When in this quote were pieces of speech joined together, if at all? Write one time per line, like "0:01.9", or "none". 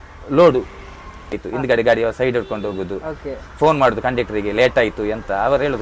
0:01.4

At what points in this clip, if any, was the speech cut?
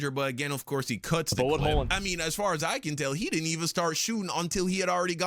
0:01.8

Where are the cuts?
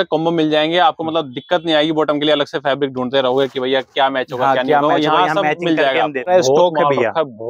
0:06.3

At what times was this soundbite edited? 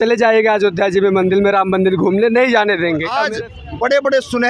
0:03.1

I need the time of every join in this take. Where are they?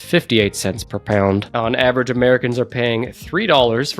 0:01.5

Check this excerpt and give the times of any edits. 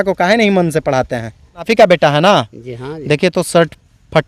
0:01.7

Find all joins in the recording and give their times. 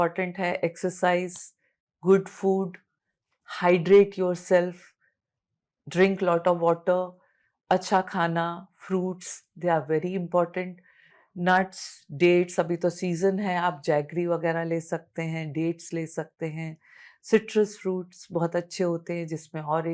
none

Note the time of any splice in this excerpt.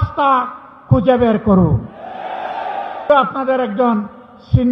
0:03.1

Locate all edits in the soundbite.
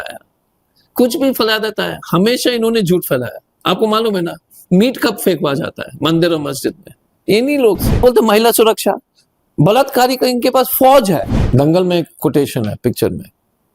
0:08.0
0:11.4

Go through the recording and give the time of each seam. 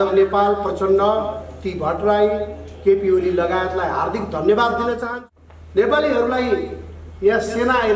0:05.1

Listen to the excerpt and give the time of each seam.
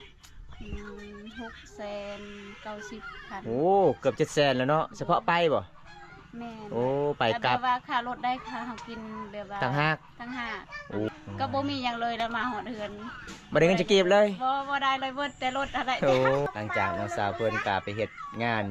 0:11.1
0:16.4

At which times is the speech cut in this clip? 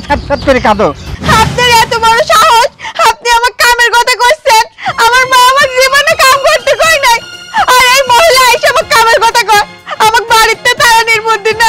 0:01.1

